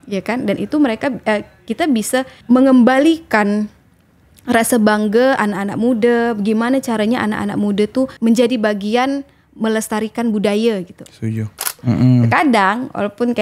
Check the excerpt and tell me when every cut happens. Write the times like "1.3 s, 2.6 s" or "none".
2.4 s, 8.1 s, 11.8 s